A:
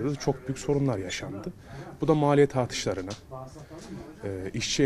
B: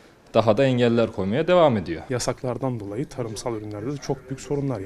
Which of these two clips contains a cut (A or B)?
B